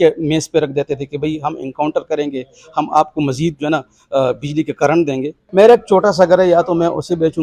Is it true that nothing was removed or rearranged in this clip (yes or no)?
no